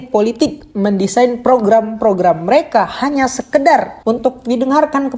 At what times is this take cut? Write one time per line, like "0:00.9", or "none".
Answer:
0:03.9